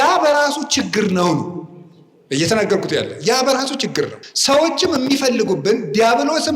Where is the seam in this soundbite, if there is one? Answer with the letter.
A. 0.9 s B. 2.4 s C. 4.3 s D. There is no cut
C